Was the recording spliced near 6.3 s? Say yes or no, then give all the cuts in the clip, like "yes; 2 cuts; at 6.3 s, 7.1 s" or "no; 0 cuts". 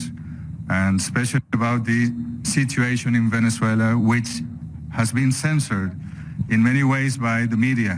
yes; 1 cut; at 6.3 s